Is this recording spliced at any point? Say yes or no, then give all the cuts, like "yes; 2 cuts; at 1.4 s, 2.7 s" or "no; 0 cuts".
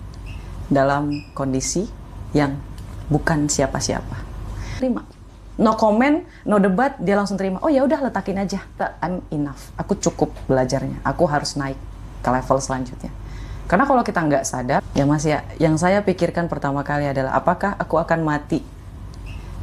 yes; 3 cuts; at 4.8 s, 8.8 s, 14.9 s